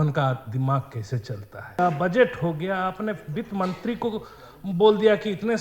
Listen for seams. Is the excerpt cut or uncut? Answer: cut